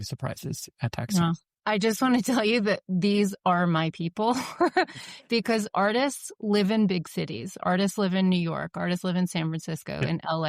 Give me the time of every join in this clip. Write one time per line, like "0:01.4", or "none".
0:01.6